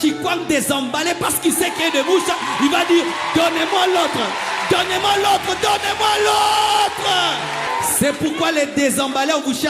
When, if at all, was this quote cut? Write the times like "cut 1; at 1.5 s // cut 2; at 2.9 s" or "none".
cut 1; at 7.7 s